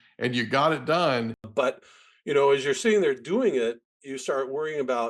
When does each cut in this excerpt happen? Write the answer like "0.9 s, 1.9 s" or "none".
1.5 s